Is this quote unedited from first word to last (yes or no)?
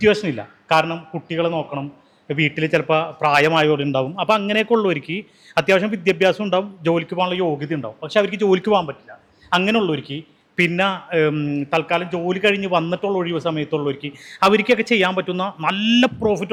yes